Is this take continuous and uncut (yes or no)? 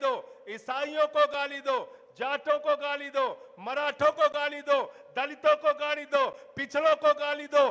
yes